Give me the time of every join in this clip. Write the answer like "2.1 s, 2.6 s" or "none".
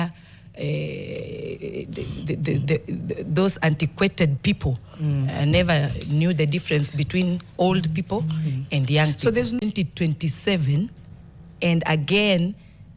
9.6 s

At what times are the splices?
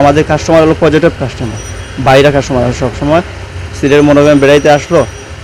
none

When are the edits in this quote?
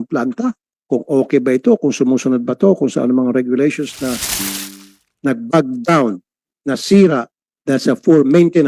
4.5 s

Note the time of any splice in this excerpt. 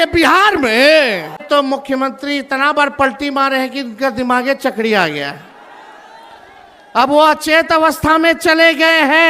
1.4 s

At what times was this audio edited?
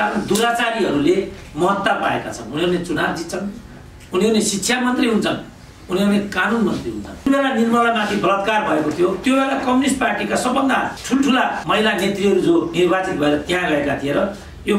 7.3 s, 9.2 s, 11.3 s, 12.7 s

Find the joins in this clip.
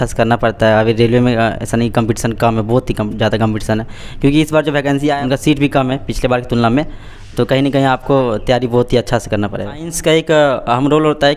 5.1 s, 9.9 s

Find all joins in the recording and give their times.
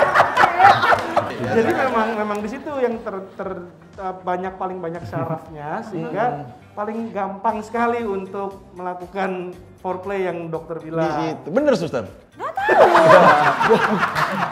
1.3 s

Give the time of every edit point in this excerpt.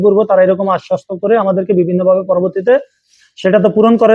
none

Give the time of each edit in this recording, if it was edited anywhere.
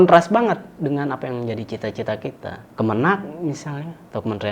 2.6 s

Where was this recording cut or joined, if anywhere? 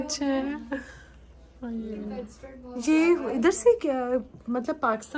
none

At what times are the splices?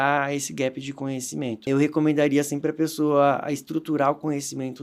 1.7 s

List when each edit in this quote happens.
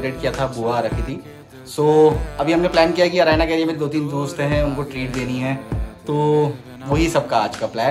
none

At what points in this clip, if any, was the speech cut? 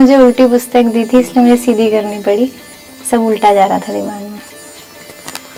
none

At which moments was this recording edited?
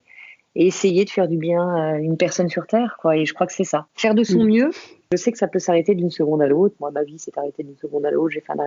5.0 s

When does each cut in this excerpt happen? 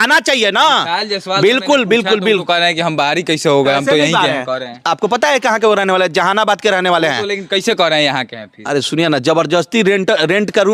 none

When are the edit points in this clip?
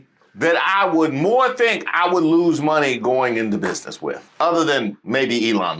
4.2 s

